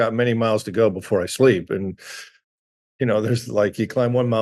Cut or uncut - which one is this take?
uncut